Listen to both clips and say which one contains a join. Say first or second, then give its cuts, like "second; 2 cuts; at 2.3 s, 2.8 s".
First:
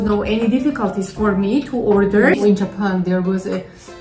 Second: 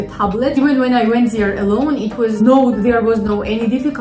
first; 1 cut; at 2.4 s